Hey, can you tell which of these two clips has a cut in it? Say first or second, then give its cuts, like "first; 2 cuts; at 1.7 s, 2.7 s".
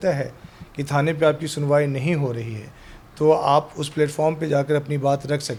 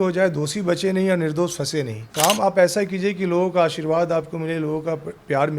second; 1 cut; at 2.0 s